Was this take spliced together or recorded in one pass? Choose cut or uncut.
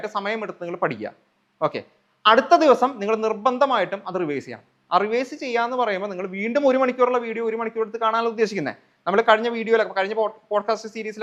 uncut